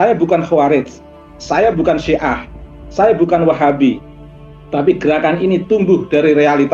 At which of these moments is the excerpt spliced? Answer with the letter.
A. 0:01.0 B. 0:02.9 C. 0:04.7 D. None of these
D